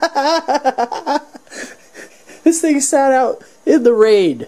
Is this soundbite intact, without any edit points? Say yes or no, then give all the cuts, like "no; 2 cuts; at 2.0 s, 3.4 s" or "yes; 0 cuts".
yes; 0 cuts